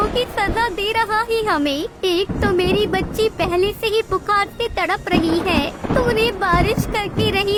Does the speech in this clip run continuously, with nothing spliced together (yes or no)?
yes